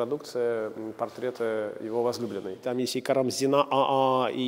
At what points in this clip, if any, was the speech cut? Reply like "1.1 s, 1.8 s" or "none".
2.6 s